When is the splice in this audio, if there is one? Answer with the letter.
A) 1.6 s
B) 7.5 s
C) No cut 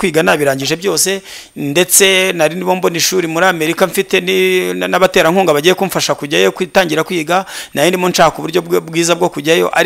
C